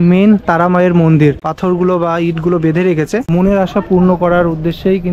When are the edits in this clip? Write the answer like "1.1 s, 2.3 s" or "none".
1.5 s, 3.2 s